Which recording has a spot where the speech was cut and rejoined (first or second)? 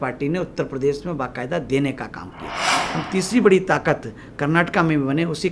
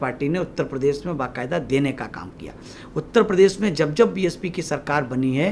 first